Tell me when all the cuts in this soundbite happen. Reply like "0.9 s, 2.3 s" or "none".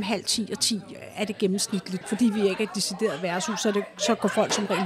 2.0 s